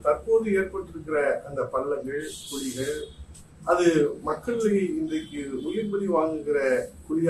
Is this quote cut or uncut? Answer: uncut